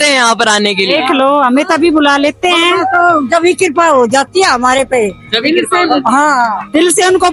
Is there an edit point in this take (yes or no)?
no